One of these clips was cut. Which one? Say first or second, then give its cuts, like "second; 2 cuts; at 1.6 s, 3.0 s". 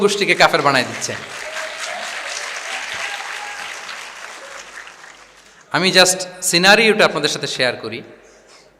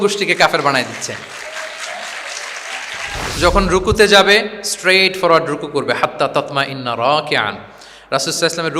second; 1 cut; at 3.3 s